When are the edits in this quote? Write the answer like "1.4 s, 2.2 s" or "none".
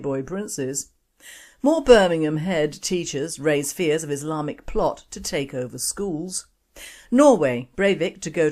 0.9 s